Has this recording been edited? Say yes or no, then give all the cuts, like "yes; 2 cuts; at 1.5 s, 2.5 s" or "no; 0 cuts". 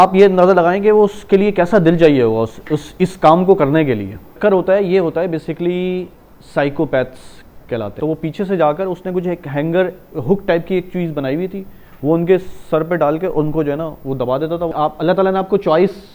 yes; 3 cuts; at 4.4 s, 7.9 s, 14.7 s